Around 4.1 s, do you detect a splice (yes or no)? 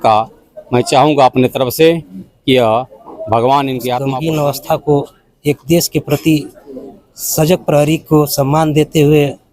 yes